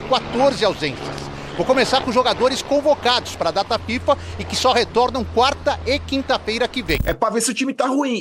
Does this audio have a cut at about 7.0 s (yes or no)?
yes